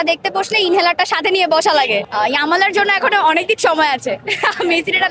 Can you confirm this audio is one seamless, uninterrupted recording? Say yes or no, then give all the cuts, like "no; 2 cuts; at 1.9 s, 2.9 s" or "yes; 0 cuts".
no; 1 cut; at 2.1 s